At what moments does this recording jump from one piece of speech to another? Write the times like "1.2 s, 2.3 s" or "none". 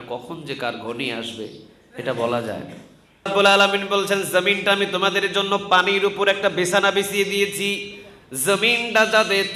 3.3 s